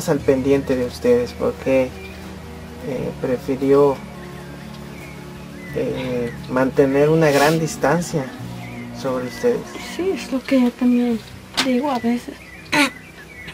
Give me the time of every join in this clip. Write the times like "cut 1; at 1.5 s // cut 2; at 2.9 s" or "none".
cut 1; at 4.0 s // cut 2; at 5.3 s